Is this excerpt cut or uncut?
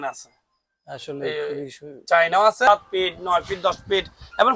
cut